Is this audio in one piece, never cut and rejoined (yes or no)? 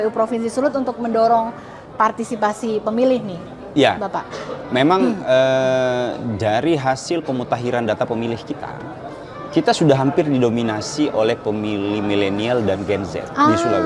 yes